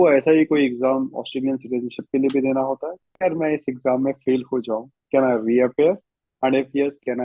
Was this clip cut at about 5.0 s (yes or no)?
no